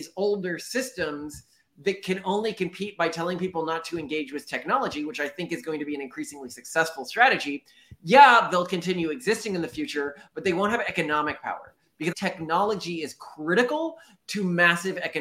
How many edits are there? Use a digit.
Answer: 1